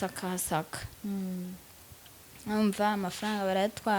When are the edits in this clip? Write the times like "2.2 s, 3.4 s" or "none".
none